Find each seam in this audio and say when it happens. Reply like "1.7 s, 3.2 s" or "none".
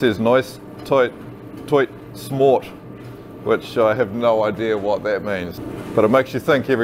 5.5 s